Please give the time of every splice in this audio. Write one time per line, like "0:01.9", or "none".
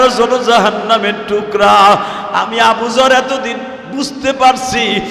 none

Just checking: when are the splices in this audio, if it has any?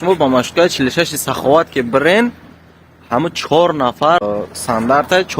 0:04.2

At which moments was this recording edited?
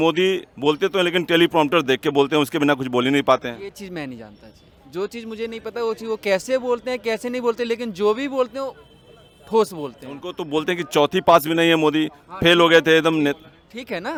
none

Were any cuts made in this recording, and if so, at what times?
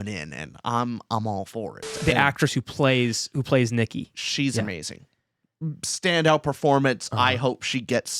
0:01.9

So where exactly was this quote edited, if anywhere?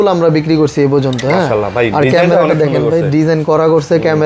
none

